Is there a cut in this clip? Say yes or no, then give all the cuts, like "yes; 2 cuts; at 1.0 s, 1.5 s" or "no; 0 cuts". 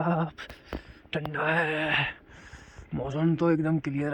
no; 0 cuts